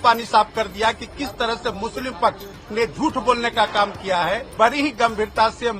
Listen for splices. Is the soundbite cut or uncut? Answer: cut